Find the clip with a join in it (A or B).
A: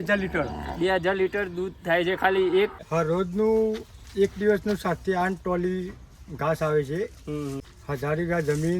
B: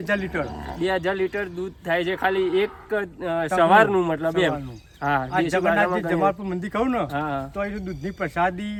A